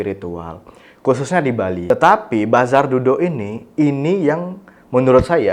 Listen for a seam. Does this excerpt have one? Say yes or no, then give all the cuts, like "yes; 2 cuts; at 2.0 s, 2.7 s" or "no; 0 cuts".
yes; 1 cut; at 1.9 s